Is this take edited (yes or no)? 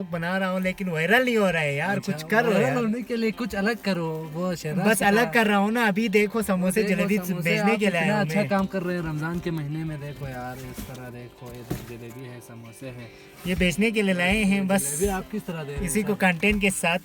no